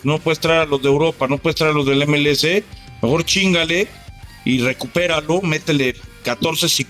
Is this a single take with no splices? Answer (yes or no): yes